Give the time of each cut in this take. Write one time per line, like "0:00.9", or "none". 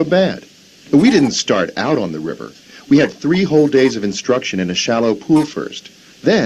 0:04.3